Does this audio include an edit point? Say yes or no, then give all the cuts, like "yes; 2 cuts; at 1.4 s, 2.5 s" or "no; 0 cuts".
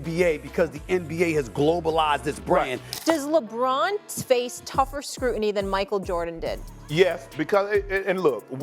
yes; 1 cut; at 2.8 s